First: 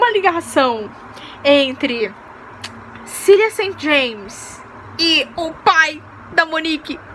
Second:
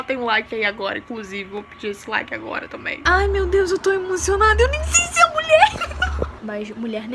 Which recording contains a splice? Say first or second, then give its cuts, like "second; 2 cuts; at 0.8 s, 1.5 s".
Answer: second; 2 cuts; at 3.0 s, 6.3 s